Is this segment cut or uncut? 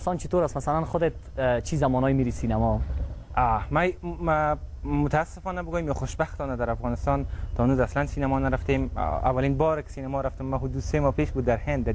cut